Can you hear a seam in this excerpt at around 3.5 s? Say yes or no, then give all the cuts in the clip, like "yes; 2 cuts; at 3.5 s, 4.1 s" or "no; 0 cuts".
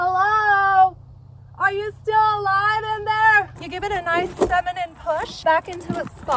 yes; 1 cut; at 3.5 s